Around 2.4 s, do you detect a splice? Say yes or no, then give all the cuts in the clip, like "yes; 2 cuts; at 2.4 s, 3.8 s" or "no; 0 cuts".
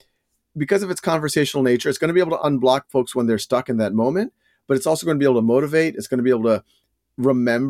yes; 1 cut; at 2.4 s